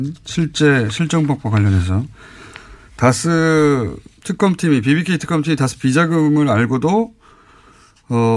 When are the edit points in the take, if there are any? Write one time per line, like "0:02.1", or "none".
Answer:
0:03.1